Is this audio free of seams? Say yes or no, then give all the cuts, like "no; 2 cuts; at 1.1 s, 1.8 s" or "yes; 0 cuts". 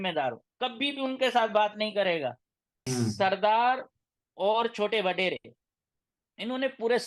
no; 1 cut; at 2.9 s